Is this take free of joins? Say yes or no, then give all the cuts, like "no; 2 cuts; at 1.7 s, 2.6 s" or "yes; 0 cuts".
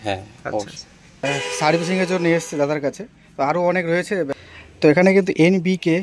no; 2 cuts; at 1.2 s, 4.4 s